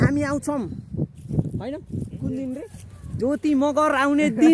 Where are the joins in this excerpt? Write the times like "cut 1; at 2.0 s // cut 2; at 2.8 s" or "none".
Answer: none